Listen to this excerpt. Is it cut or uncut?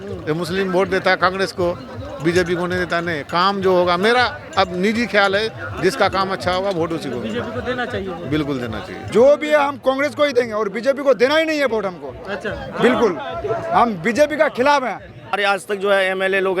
cut